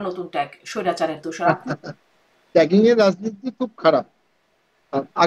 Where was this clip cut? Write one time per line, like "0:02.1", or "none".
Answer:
0:01.5